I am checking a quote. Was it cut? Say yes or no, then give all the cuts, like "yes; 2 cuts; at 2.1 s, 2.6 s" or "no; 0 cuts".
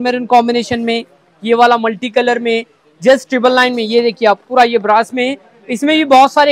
no; 0 cuts